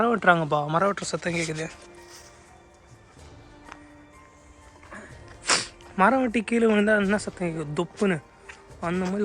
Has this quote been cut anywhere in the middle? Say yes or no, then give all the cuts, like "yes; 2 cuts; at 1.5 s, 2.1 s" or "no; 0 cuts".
no; 0 cuts